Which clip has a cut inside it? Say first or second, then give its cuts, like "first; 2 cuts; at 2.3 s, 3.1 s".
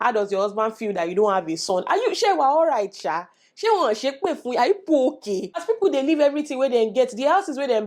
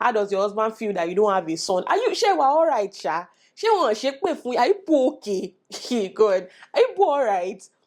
first; 1 cut; at 5.6 s